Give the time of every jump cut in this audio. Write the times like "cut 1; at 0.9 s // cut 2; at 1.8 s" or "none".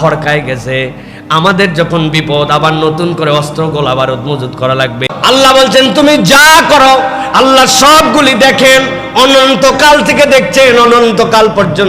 cut 1; at 5.1 s